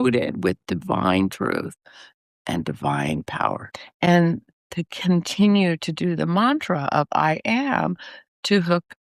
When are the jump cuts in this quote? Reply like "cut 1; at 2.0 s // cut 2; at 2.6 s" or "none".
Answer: none